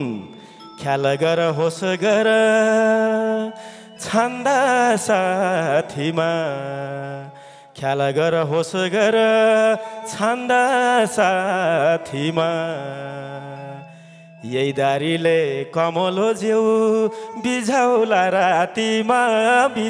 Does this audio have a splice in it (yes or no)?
no